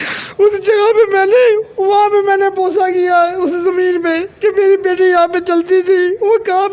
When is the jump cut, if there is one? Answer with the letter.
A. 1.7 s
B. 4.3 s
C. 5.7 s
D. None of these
D